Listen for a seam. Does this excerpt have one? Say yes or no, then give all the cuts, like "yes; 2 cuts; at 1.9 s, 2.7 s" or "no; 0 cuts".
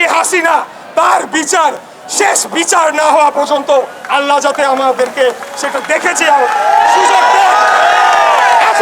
no; 0 cuts